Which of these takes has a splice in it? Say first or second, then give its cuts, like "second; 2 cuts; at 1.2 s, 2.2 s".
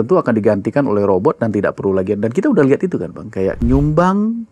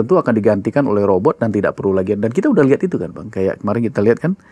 first; 1 cut; at 3.6 s